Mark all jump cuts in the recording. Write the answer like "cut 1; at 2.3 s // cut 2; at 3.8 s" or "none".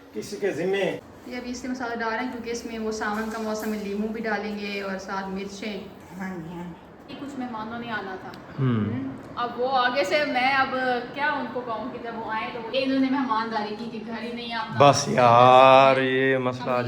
cut 1; at 1.0 s // cut 2; at 7.1 s // cut 3; at 12.7 s